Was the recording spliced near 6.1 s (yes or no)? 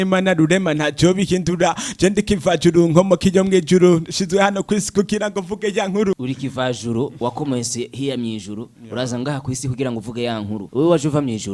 yes